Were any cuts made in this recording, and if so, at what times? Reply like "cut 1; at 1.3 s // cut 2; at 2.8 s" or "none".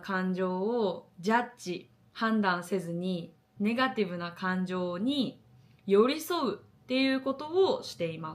cut 1; at 3.4 s